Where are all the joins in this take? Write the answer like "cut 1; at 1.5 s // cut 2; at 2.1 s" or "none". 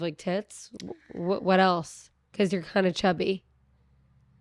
none